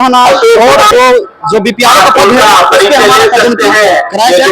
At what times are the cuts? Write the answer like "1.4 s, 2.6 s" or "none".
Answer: 0.9 s